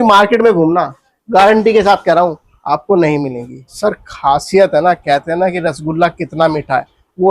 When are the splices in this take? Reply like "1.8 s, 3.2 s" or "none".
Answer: 3.7 s